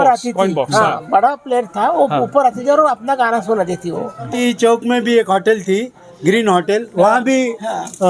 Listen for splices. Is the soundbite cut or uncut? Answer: cut